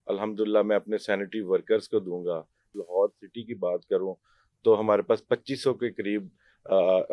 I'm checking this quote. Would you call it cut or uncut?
cut